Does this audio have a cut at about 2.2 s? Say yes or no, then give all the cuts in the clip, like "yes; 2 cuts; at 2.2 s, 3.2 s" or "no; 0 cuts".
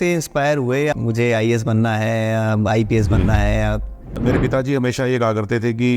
no; 2 cuts; at 0.9 s, 4.2 s